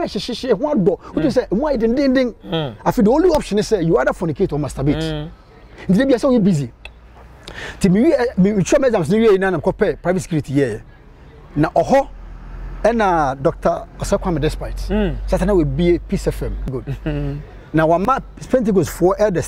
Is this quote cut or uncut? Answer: uncut